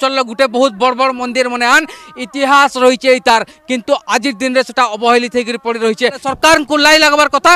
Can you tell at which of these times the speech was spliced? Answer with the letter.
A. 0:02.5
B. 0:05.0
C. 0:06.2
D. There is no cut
C